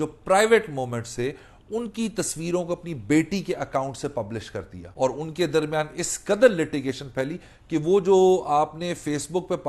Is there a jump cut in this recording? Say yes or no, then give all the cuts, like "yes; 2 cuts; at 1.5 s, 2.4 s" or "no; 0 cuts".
yes; 1 cut; at 4.8 s